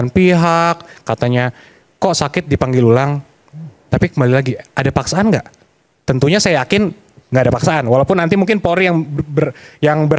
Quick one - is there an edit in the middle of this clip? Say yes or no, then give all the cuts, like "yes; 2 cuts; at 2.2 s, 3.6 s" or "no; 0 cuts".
no; 0 cuts